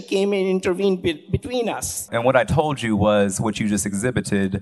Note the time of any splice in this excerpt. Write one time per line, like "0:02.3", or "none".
0:02.1